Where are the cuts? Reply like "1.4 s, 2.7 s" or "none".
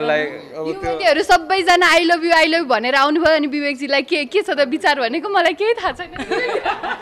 none